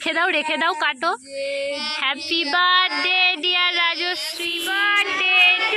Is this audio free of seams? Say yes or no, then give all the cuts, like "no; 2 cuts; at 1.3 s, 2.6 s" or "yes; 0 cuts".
no; 1 cut; at 4.7 s